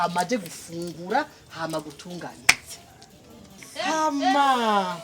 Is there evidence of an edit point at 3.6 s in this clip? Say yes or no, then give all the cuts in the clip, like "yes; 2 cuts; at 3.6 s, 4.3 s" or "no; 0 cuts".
yes; 1 cut; at 3.6 s